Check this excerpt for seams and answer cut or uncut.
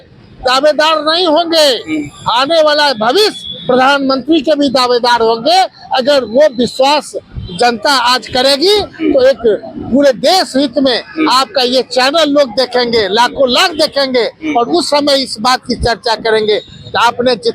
uncut